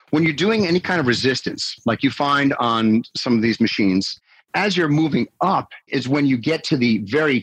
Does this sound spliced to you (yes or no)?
yes